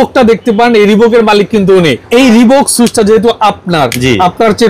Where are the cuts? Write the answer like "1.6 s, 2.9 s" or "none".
2.0 s